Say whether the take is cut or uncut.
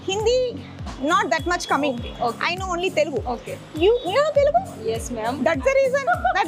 uncut